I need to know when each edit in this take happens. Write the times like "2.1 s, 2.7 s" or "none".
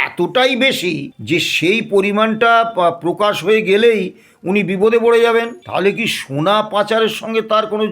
1.1 s, 5.6 s